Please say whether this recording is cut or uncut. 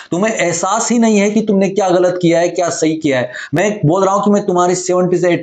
uncut